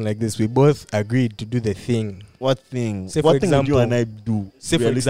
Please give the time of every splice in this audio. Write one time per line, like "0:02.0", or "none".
0:02.3